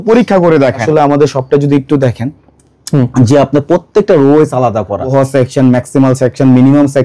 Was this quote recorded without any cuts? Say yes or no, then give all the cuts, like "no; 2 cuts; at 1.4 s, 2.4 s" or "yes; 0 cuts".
no; 2 cuts; at 0.8 s, 5.1 s